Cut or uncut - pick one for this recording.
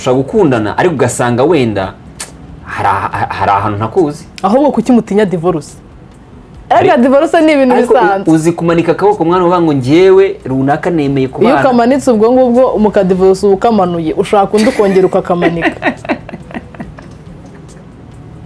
uncut